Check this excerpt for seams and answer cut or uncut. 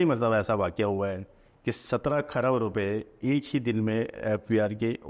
uncut